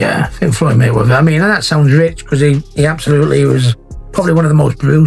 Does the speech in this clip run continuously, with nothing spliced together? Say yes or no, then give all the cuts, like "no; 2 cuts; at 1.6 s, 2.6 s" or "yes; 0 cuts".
yes; 0 cuts